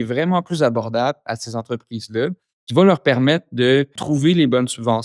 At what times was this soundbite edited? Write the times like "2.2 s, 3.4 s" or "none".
4.0 s